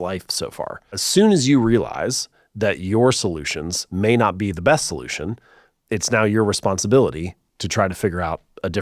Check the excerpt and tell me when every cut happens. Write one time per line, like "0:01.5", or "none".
0:01.0